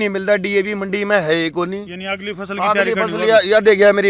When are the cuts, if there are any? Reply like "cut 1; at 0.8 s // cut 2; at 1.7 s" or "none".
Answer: none

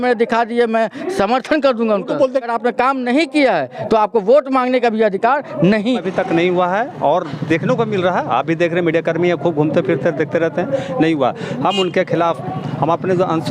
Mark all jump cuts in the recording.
cut 1; at 2.4 s // cut 2; at 6.1 s

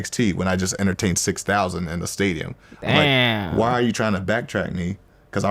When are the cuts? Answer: cut 1; at 3.2 s

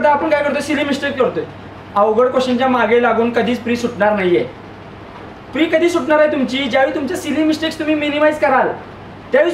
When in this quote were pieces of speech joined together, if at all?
none

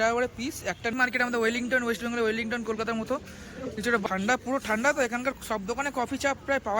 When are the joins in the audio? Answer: cut 1; at 0.9 s // cut 2; at 4.1 s

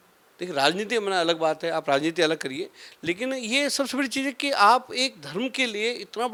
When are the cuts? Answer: none

